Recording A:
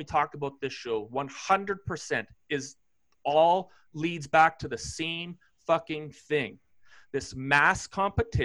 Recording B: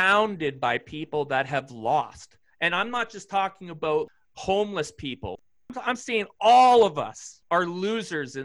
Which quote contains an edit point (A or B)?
B